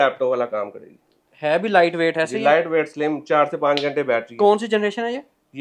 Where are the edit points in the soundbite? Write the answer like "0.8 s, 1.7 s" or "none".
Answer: none